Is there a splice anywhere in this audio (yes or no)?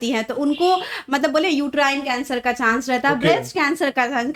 no